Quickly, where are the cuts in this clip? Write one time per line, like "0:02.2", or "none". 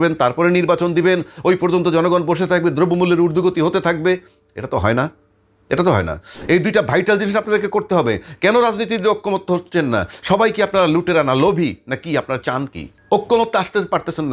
0:12.9